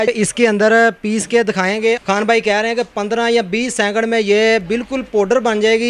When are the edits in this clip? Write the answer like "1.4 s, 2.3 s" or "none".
none